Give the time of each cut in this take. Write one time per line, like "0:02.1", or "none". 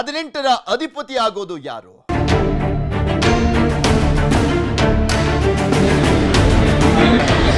0:02.1